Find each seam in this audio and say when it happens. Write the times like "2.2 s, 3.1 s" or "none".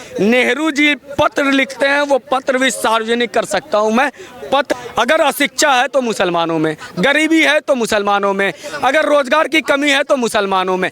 4.7 s